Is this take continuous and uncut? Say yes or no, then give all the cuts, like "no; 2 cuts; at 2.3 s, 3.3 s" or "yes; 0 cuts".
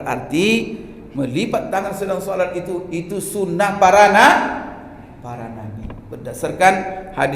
yes; 0 cuts